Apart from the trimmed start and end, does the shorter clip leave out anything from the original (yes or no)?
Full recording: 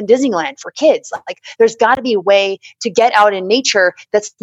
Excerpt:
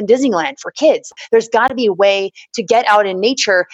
yes